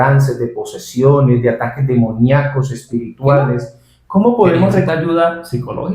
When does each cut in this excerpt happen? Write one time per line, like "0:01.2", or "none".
0:04.9